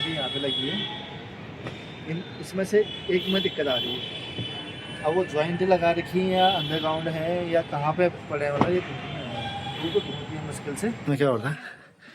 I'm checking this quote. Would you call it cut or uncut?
cut